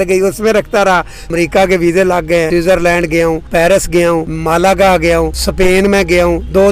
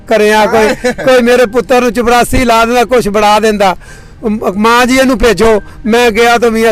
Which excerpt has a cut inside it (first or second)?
first